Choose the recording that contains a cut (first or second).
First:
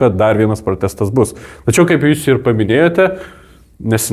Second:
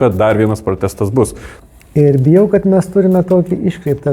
second